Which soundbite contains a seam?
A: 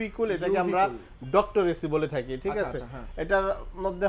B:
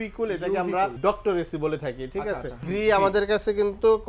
B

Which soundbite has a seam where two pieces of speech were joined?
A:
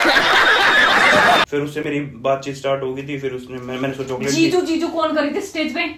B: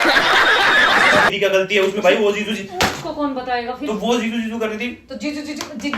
B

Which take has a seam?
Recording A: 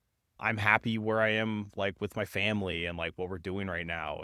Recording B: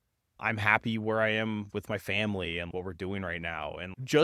B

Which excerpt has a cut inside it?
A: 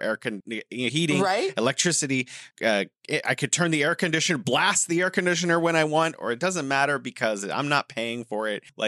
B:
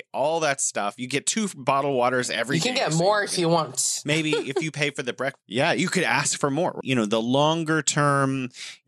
B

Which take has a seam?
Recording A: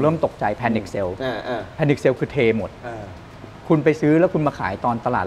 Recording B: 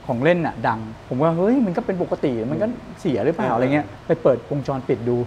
B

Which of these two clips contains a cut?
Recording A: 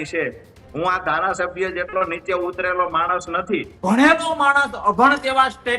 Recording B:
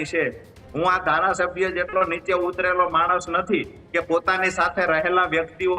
A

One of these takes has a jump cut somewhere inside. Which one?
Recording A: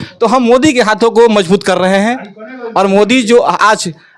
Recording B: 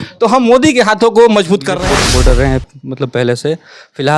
B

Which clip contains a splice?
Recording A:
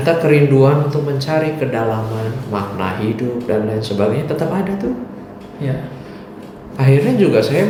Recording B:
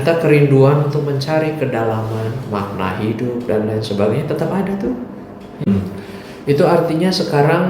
B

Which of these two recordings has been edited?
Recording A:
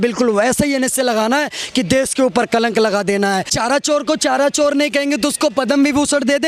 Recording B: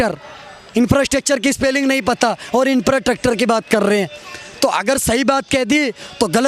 A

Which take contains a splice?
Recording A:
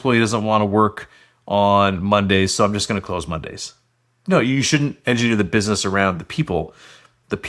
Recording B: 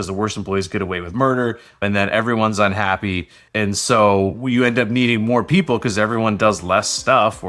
B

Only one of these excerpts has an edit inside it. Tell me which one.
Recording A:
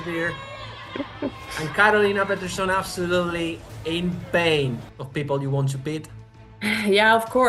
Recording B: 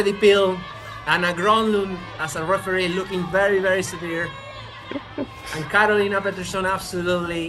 A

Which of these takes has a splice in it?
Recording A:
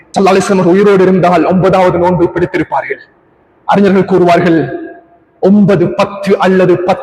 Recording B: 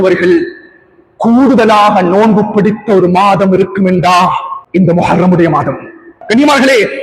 B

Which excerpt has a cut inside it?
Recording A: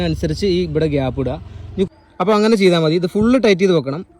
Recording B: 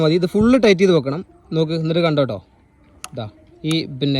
A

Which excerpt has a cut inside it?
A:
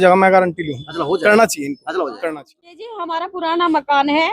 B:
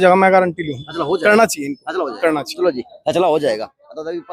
A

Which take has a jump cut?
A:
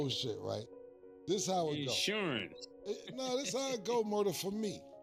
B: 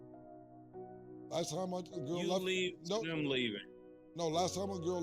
B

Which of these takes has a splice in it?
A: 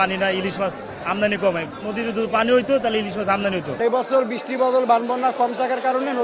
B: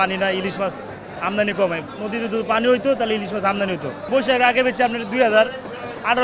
A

